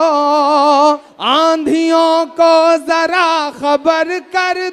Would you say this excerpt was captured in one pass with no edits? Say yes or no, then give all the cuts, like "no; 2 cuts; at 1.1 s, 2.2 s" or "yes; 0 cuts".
no; 1 cut; at 1.1 s